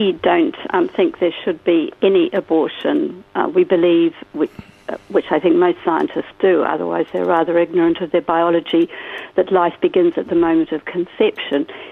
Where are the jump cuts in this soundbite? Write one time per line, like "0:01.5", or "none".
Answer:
0:10.8